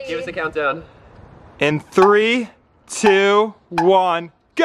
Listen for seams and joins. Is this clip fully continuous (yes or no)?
yes